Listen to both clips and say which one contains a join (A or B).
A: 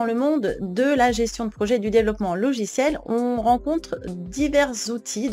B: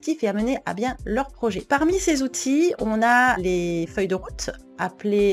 B